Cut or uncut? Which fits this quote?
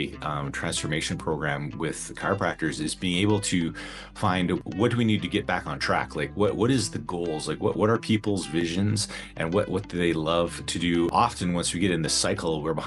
cut